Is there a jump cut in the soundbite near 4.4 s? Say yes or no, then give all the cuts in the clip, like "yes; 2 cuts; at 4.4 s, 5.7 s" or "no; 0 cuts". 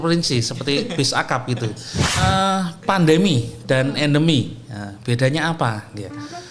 no; 1 cut; at 2.2 s